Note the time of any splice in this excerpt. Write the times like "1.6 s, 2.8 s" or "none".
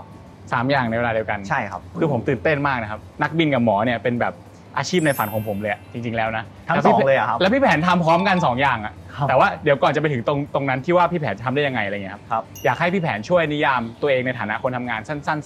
none

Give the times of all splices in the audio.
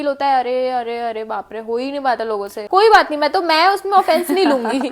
2.6 s

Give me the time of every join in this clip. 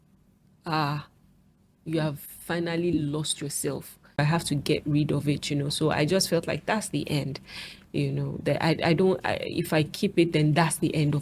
4.2 s

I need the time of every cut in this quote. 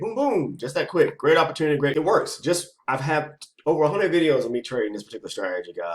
1.9 s

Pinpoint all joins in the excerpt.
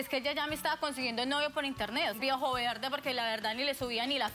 2.2 s

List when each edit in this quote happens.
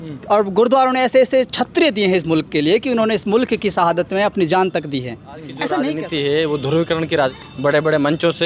5.9 s, 7.4 s

